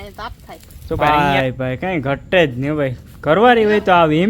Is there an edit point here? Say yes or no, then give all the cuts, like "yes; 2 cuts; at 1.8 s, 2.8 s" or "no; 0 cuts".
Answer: yes; 1 cut; at 1.1 s